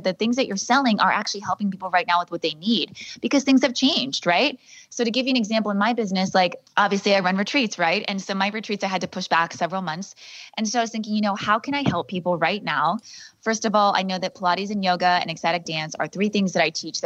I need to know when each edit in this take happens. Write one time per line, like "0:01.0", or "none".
none